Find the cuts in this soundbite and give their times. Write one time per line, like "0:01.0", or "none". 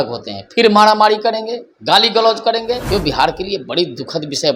0:02.8